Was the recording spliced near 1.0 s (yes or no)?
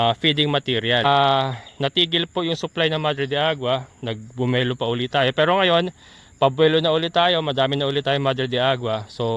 yes